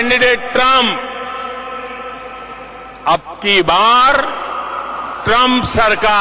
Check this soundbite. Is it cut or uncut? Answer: uncut